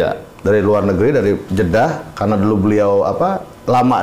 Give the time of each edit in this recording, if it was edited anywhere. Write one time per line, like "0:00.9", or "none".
0:01.5